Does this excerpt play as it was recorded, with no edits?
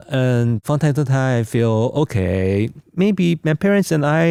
yes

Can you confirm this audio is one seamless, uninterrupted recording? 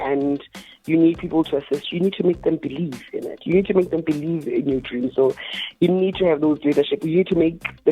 yes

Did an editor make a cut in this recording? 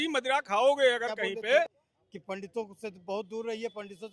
yes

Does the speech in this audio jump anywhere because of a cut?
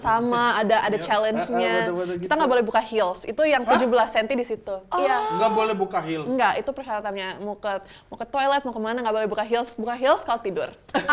no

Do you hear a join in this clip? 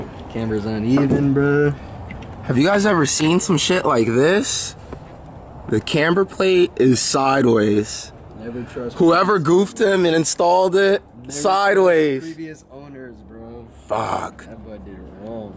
no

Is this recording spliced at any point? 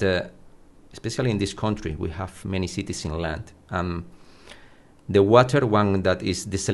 no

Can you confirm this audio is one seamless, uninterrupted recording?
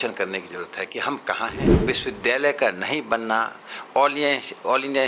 no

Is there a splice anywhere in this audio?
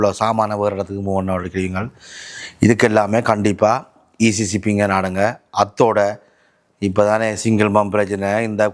no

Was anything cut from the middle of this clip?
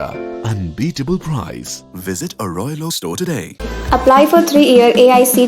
no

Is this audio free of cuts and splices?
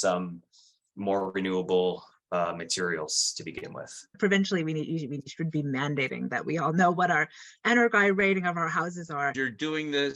no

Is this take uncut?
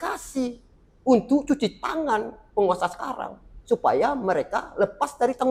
yes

